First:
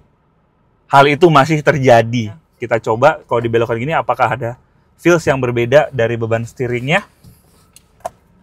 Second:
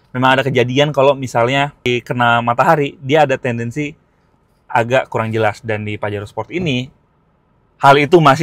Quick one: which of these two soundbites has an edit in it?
first; 1 cut; at 2.5 s

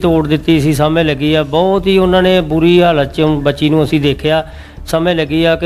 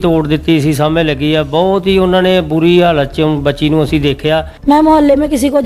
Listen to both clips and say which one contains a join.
second; 1 cut; at 4.5 s

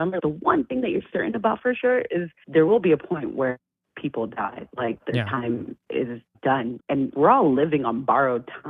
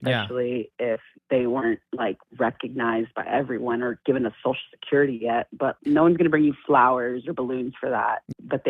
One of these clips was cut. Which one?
first; 2 cuts; at 2.4 s, 6.2 s

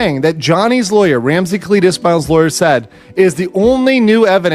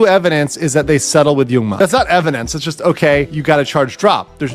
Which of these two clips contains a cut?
second; 2 cuts; at 1.7 s, 3.3 s

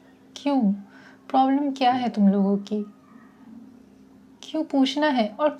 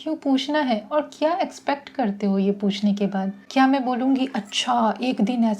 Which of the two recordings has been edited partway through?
second; 1 cut; at 3.4 s

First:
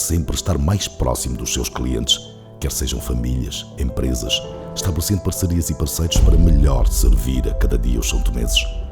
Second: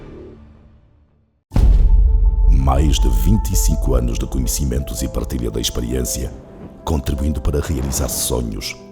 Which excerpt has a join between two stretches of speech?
second; 1 cut; at 1.2 s

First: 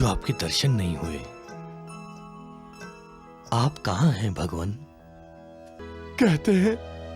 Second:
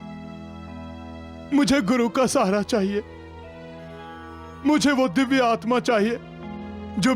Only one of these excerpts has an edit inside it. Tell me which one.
first; 1 cut; at 5.8 s

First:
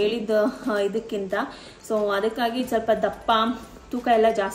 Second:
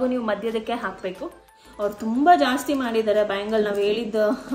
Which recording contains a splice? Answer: second; 1 cut; at 1.5 s

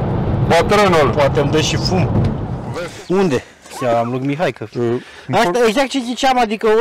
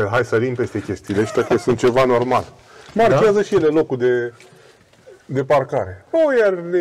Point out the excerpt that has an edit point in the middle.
first; 1 cut; at 2.5 s

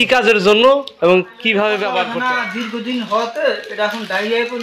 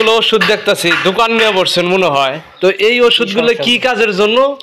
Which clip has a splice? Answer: first; 1 cut; at 2.0 s

